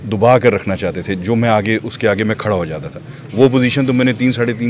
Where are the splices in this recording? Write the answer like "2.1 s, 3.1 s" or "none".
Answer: none